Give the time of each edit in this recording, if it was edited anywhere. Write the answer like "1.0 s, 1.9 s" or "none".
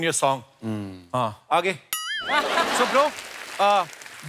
2.8 s